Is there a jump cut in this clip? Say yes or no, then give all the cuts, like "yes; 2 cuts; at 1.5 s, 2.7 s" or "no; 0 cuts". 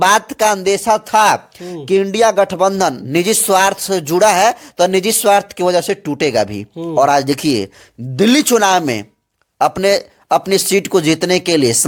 no; 0 cuts